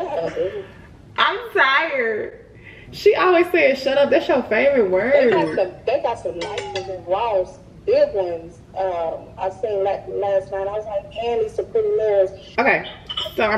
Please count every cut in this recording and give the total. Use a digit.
0